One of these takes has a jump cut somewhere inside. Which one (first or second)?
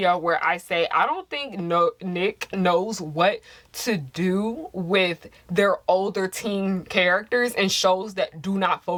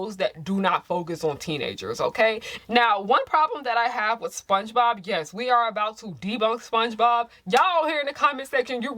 second